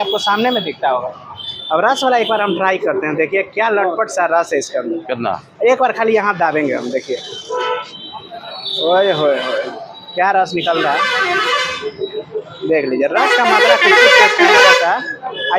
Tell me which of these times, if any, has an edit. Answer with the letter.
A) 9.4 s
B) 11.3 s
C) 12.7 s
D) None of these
D